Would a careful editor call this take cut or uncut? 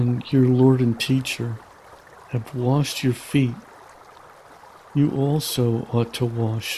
uncut